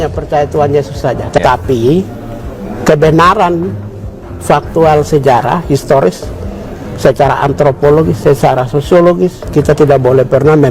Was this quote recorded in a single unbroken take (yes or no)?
no